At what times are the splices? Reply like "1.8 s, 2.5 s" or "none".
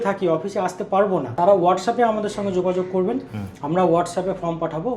1.3 s